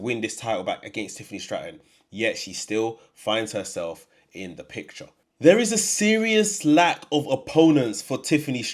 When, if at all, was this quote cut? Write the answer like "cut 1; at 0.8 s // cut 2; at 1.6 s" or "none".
cut 1; at 5.2 s